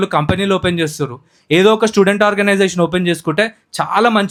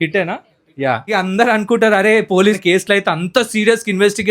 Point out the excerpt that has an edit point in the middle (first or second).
second